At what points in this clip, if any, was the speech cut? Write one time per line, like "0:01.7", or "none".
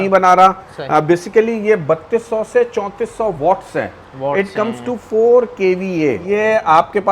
0:06.2